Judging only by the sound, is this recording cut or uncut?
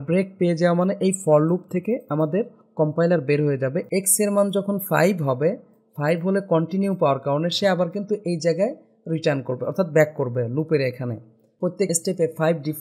cut